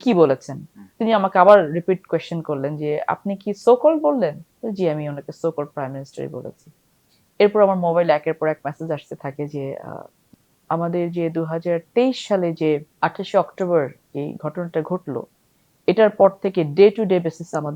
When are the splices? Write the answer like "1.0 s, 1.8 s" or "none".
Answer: 4.5 s, 10.2 s, 12.9 s